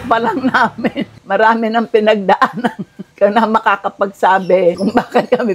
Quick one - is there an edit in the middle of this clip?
no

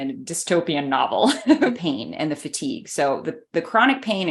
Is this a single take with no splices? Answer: no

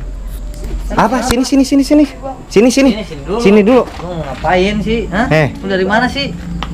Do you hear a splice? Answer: no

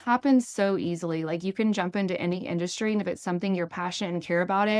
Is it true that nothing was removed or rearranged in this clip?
yes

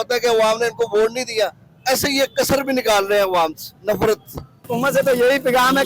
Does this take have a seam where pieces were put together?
yes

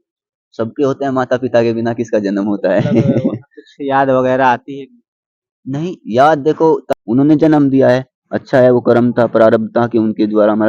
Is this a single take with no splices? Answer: no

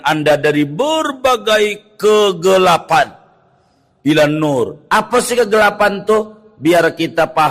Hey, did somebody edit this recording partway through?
no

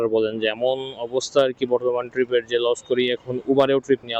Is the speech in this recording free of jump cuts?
yes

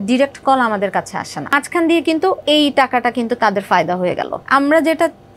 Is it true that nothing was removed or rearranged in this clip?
no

